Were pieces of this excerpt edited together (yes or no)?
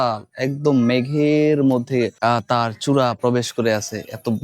yes